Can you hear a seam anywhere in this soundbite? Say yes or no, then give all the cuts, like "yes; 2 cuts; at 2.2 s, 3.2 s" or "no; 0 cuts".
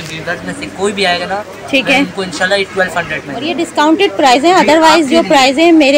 yes; 1 cut; at 3.5 s